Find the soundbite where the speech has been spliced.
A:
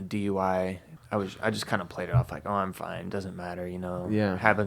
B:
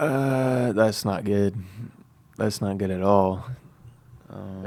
A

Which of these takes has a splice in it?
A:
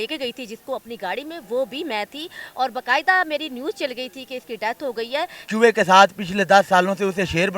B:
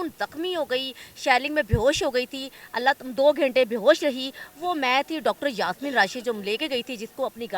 A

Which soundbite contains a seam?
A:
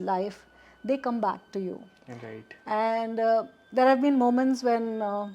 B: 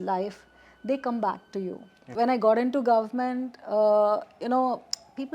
B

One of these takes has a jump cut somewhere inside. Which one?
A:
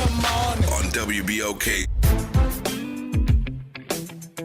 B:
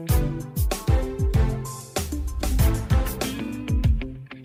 A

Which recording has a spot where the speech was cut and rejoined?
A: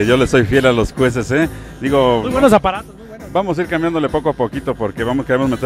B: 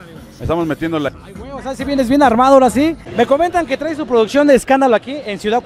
B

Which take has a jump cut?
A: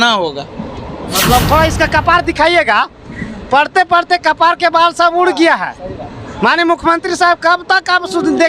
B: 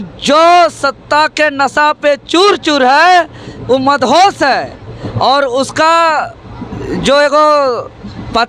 A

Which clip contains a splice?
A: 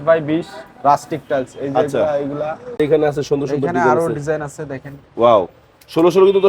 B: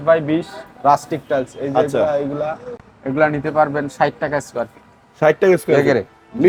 A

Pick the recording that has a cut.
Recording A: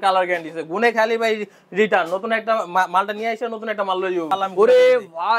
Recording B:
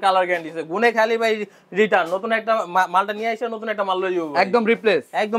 A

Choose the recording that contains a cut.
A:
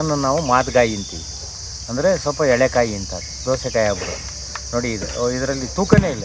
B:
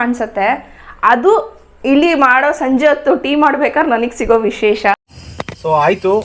B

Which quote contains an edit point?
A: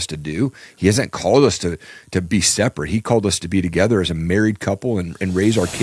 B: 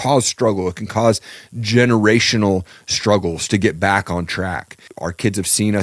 B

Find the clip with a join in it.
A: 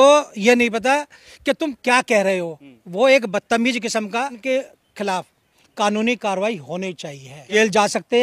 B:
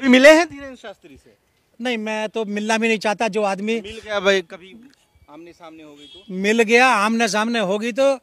A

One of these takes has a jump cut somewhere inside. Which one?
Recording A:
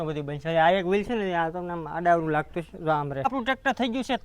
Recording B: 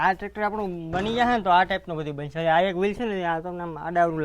A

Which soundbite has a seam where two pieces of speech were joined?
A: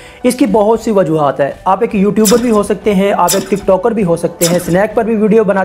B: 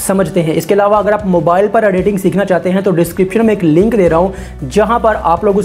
B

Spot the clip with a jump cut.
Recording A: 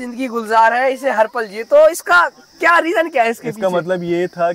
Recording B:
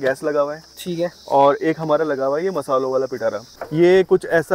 B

